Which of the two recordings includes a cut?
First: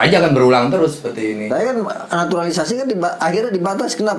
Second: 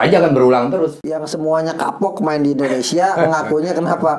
second; 1 cut; at 1.0 s

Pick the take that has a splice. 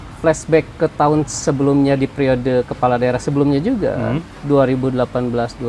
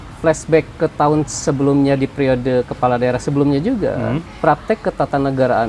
second; 1 cut; at 4.3 s

